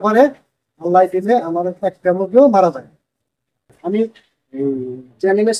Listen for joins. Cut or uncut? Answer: cut